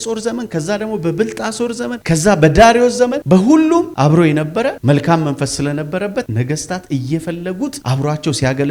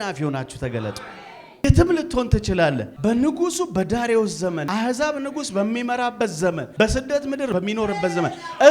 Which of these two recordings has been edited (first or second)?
second